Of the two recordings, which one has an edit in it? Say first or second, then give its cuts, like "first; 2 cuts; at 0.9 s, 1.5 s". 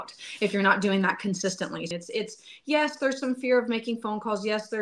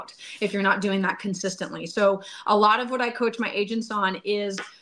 first; 1 cut; at 1.8 s